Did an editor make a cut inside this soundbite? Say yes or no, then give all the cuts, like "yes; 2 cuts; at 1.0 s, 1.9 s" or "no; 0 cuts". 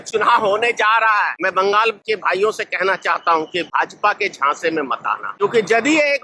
yes; 4 cuts; at 1.3 s, 2.0 s, 3.7 s, 5.4 s